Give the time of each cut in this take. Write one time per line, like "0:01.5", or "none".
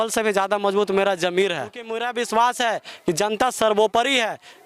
0:02.1

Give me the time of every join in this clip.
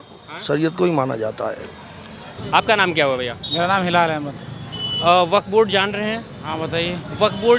none

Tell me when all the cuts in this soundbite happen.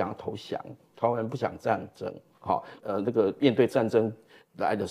none

